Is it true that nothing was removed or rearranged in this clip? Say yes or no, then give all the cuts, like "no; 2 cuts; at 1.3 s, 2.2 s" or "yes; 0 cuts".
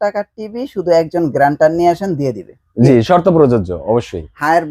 yes; 0 cuts